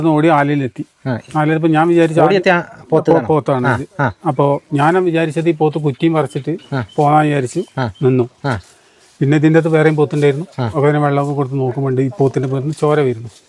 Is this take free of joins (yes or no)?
yes